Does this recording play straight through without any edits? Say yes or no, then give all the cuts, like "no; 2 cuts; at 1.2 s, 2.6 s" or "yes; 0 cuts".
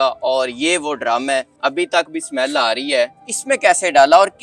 no; 2 cuts; at 1.5 s, 3.3 s